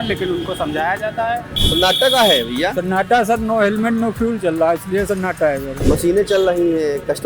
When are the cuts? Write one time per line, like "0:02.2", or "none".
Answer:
0:01.6
0:05.7